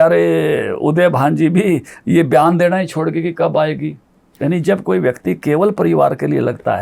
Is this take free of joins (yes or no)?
no